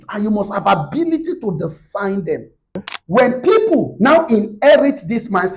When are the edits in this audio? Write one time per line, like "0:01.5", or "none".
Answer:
0:02.9